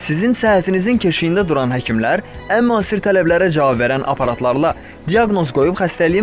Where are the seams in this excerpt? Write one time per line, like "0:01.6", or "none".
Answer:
none